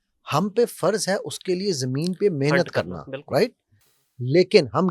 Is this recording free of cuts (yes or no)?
yes